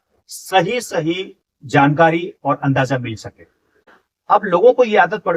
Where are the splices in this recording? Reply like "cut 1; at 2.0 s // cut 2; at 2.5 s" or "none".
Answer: cut 1; at 3.3 s

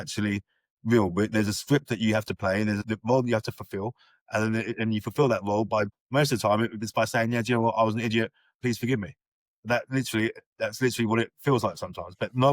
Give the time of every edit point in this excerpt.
cut 1; at 2.9 s // cut 2; at 5.9 s // cut 3; at 8.5 s

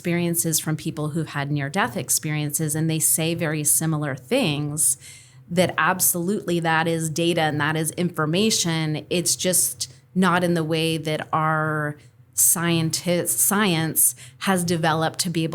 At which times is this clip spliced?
none

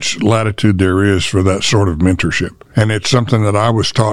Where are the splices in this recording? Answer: cut 1; at 2.5 s

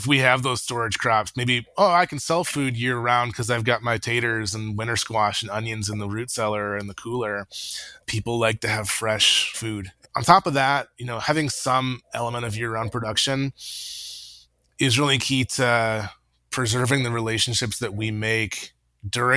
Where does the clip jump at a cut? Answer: cut 1; at 9.9 s

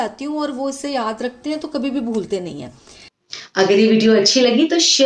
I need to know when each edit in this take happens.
cut 1; at 3.5 s

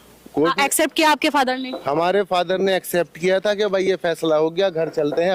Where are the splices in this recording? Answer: none

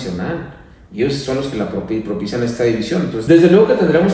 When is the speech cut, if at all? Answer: cut 1; at 3.2 s

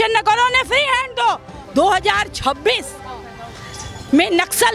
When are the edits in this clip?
cut 1; at 1.6 s

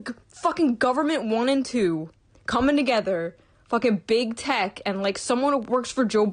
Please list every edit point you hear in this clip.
none

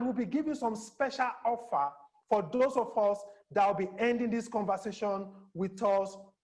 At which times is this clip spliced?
none

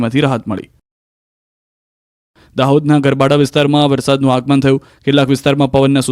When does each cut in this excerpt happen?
none

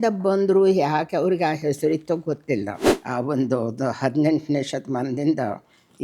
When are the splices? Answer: cut 1; at 2.9 s

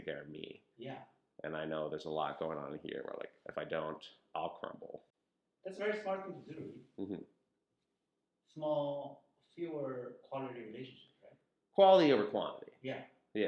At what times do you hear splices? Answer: none

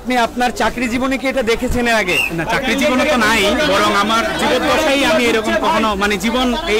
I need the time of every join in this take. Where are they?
none

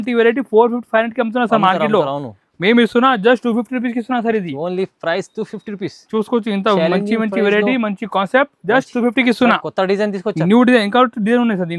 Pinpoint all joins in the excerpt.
none

